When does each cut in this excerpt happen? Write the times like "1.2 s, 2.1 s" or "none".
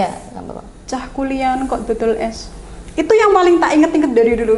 none